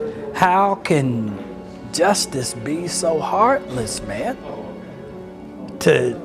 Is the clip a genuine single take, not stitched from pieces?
yes; 0 cuts

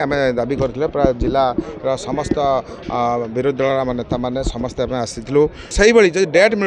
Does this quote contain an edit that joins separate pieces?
yes; 1 cut; at 5.6 s

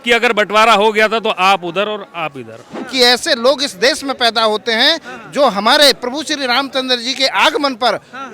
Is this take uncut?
no; 1 cut; at 2.8 s

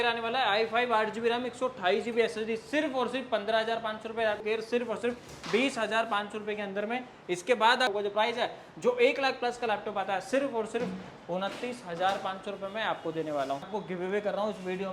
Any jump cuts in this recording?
yes; 3 cuts; at 4.4 s, 7.9 s, 13.7 s

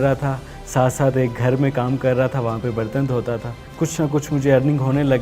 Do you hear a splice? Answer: yes; 1 cut; at 3.6 s

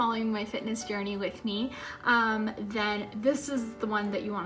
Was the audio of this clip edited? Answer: no; 0 cuts

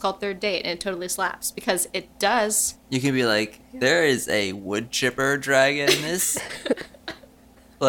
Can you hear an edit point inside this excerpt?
yes; 1 cut; at 2.7 s

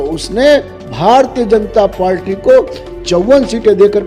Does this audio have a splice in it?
no; 0 cuts

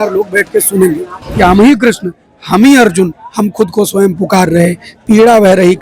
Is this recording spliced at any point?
yes; 1 cut; at 1.2 s

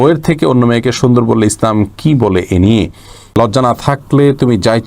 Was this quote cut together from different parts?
yes; 1 cut; at 3.4 s

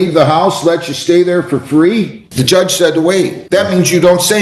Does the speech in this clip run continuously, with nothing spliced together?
no; 2 cuts; at 2.2 s, 3.4 s

